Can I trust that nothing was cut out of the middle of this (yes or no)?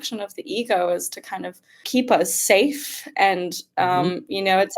no